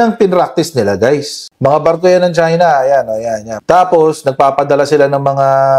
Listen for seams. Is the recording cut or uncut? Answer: cut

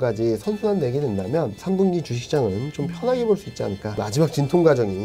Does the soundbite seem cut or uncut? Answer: cut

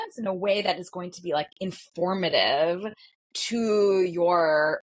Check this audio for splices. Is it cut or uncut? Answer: uncut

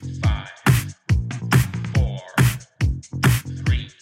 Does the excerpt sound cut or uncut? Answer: cut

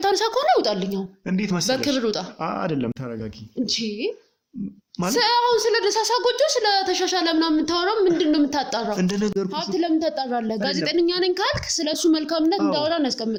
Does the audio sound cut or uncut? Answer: uncut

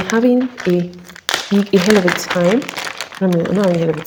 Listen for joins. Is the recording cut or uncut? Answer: uncut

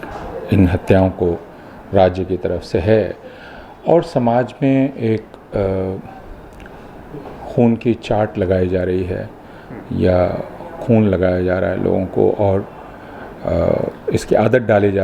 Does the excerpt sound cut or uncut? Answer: uncut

